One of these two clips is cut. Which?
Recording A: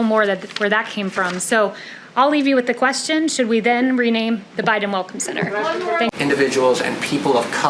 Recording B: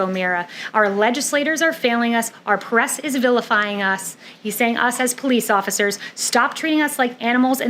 A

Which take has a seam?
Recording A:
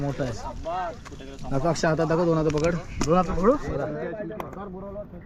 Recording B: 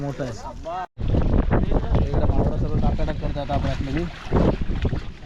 B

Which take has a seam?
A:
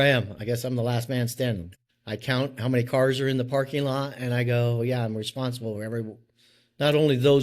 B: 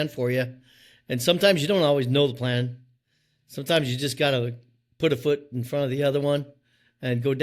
A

